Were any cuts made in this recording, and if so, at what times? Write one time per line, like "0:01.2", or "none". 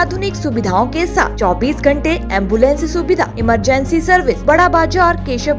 0:04.4